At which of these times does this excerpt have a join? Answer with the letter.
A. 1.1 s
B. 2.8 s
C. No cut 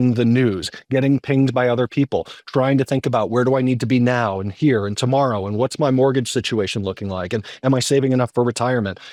C